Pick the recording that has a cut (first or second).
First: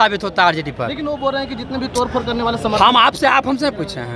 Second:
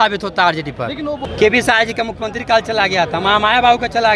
second